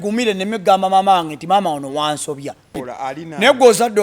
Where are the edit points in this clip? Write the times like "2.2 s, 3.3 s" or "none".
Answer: 2.8 s